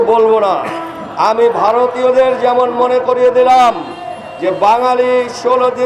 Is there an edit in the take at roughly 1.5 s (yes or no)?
no